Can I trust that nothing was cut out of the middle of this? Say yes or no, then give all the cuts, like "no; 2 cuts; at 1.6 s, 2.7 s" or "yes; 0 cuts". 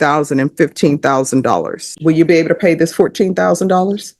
no; 1 cut; at 1.9 s